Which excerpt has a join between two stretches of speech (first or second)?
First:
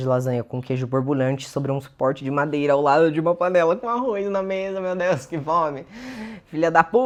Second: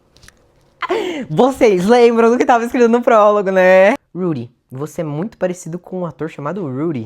second